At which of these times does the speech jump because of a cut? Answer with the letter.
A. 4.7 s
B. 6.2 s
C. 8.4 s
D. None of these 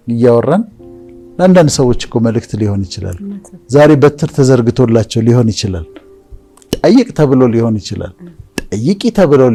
D